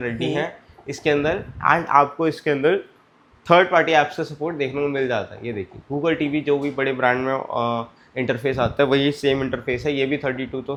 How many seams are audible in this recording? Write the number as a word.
zero